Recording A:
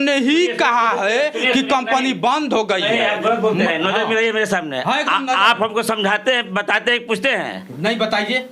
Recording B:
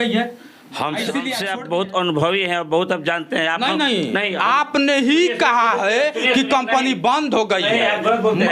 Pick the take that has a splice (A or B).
B